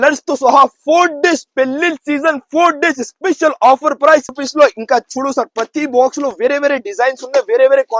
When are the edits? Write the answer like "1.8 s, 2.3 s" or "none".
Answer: 4.4 s